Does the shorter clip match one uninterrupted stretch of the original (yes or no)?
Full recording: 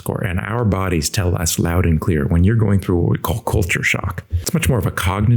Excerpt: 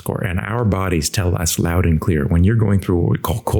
yes